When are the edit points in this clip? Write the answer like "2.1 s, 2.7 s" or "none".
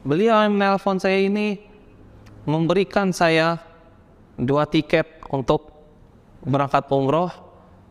none